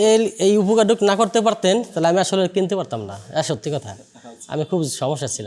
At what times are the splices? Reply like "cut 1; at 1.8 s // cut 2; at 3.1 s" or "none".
none